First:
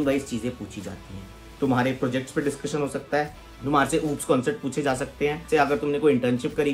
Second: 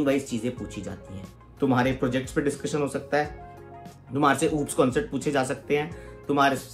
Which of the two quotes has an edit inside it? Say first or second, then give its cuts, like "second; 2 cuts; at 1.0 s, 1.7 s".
first; 2 cuts; at 3.5 s, 5.4 s